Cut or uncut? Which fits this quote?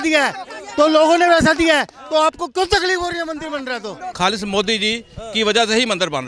cut